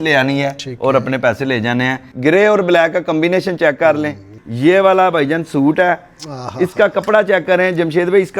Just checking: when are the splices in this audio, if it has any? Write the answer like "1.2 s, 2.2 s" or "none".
2.1 s, 4.3 s